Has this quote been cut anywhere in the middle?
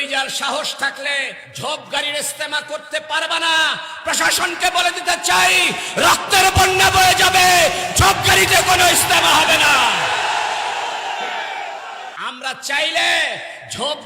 yes; 2 cuts; at 1.4 s, 12.1 s

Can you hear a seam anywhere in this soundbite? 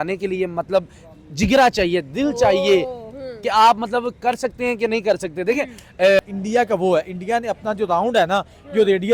yes; 1 cut; at 6.2 s

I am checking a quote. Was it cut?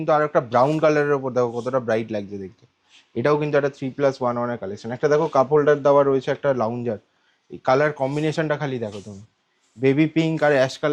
no; 0 cuts

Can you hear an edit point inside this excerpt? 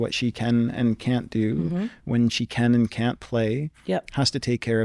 no; 0 cuts

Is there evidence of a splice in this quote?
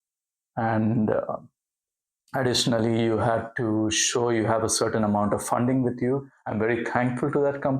yes; 1 cut; at 6.4 s

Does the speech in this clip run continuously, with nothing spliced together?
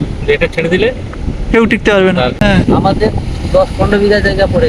no; 1 cut; at 2.3 s

